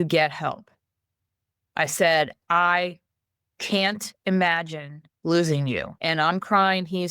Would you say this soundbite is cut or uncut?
cut